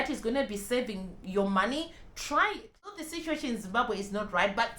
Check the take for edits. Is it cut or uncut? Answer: cut